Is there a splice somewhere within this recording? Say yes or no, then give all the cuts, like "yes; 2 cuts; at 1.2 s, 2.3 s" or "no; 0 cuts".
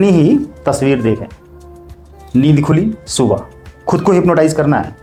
no; 0 cuts